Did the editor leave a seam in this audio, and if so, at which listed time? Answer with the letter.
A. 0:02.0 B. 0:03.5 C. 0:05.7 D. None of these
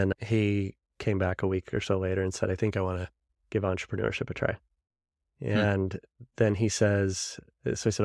D